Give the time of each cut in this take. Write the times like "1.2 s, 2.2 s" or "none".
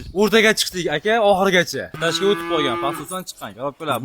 2.0 s